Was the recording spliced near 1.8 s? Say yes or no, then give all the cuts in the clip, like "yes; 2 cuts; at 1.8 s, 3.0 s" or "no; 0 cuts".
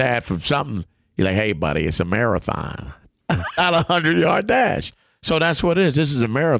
no; 1 cut; at 3.6 s